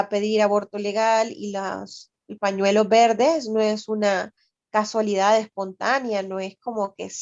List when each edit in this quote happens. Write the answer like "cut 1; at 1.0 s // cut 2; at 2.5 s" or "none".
none